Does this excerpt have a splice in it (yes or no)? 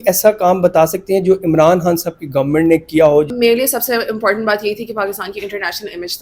yes